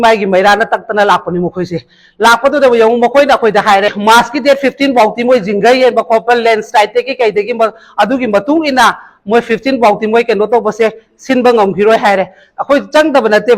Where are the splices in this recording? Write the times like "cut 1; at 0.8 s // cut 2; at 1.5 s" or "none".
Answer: cut 1; at 4.0 s